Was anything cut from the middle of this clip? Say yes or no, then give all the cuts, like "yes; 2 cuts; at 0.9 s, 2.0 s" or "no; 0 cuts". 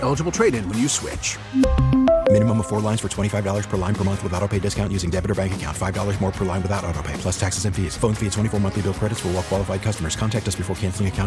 no; 0 cuts